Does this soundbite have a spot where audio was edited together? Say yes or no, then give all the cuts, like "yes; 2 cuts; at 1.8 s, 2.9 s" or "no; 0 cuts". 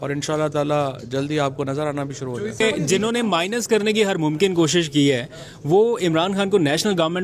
yes; 1 cut; at 2.6 s